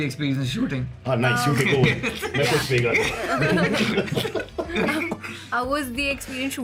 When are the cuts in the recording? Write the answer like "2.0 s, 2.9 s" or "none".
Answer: none